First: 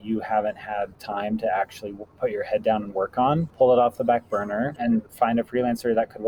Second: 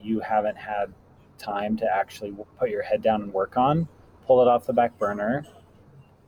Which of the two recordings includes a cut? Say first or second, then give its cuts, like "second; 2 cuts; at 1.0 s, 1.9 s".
first; 3 cuts; at 1.0 s, 3.5 s, 5.0 s